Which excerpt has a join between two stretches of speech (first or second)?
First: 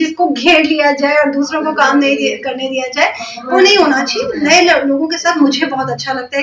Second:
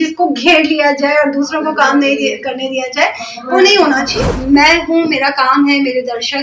second